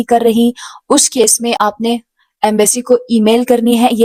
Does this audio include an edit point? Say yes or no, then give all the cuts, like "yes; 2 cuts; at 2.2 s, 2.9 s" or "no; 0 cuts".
no; 0 cuts